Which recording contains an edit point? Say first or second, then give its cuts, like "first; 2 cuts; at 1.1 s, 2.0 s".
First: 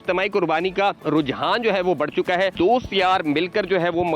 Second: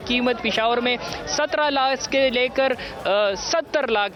first; 2 cuts; at 1.0 s, 2.5 s